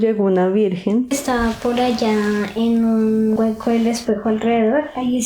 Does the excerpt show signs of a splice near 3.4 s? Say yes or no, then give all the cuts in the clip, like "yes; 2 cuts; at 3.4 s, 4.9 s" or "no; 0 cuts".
yes; 2 cuts; at 1.2 s, 3.4 s